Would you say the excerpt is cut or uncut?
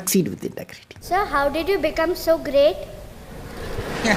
cut